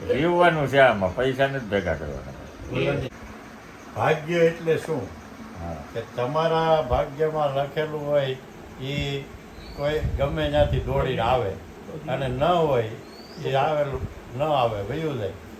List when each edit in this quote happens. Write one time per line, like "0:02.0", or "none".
0:03.1